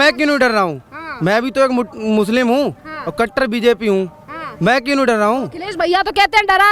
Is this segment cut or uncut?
uncut